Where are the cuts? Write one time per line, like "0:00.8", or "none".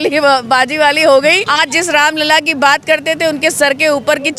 0:01.4